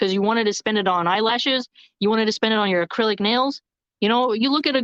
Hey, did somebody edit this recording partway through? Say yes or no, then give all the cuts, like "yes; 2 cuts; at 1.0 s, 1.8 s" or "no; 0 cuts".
no; 0 cuts